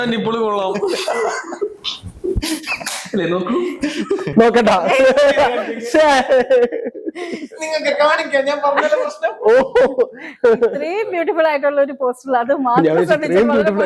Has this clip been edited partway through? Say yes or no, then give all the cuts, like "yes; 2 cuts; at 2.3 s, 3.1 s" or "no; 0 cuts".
no; 0 cuts